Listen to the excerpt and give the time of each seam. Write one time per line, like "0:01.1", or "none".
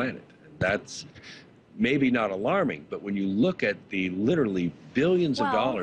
none